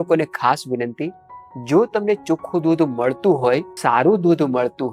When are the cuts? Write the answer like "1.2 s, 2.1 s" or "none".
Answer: 3.7 s